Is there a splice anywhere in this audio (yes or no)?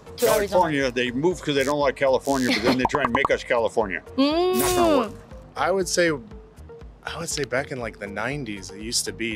no